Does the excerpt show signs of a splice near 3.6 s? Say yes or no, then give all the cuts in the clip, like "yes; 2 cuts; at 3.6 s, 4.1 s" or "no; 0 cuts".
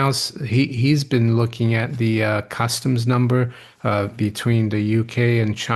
no; 0 cuts